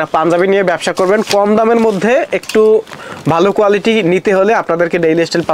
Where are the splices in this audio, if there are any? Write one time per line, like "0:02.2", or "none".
none